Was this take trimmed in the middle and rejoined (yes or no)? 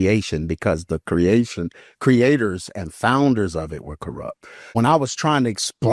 yes